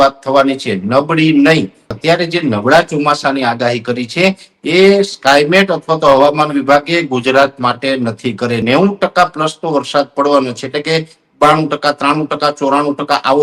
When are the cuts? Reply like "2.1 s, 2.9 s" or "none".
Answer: 2.0 s, 8.6 s